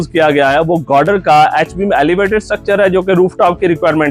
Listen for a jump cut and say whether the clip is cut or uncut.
uncut